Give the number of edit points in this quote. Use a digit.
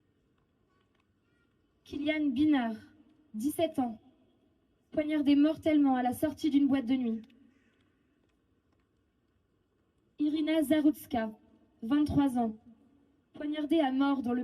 1